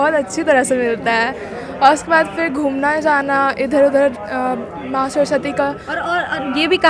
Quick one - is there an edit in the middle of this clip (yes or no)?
no